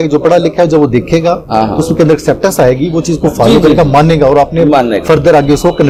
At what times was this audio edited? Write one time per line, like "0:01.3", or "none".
none